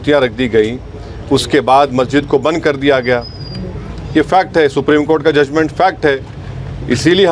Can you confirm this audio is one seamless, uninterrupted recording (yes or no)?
yes